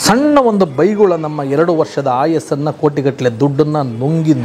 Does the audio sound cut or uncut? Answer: uncut